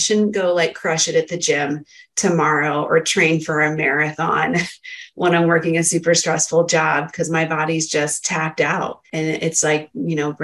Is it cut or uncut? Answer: cut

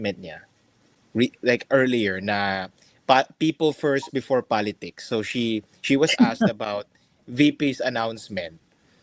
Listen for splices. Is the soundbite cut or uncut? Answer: uncut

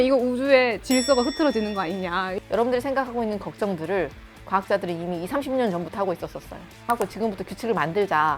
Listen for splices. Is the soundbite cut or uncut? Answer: cut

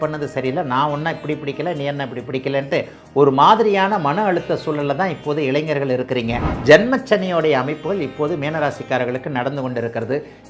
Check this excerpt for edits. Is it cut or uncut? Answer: cut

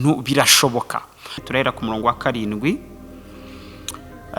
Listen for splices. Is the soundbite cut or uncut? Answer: cut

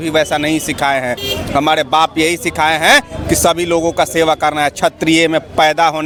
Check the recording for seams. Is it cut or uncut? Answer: uncut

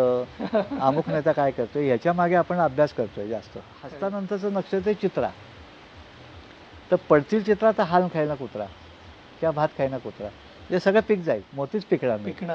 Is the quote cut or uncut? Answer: cut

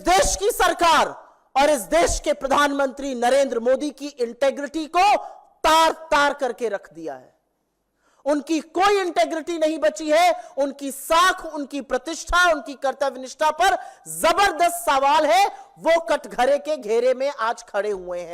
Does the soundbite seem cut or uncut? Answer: uncut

